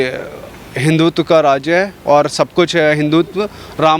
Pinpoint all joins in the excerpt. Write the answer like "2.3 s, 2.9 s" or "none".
none

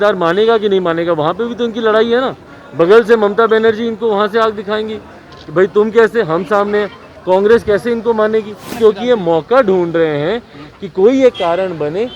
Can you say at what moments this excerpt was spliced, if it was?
8.8 s

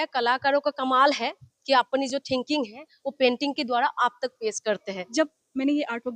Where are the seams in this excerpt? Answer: 5.0 s

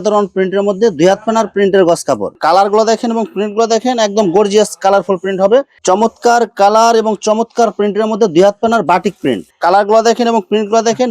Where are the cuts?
2.3 s, 5.7 s, 9.5 s

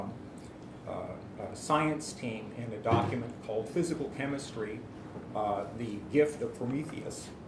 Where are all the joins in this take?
none

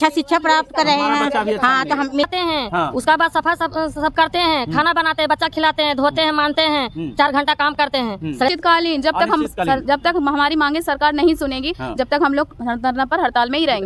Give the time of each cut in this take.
2.3 s, 8.5 s

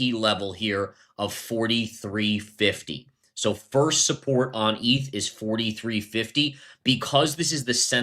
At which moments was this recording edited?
none

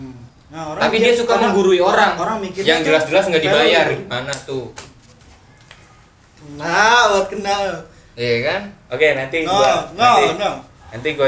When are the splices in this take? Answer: none

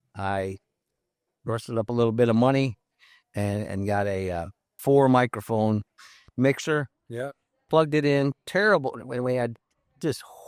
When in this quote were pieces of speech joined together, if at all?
4.7 s

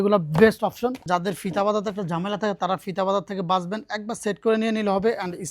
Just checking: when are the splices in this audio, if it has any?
1.0 s

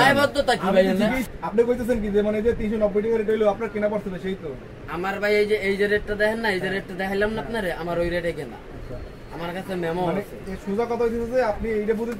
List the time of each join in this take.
1.3 s

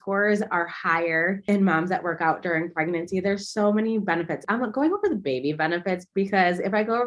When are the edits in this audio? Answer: 1.5 s, 4.4 s

